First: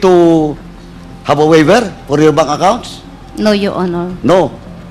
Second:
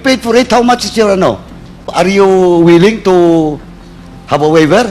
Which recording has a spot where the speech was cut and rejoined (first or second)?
second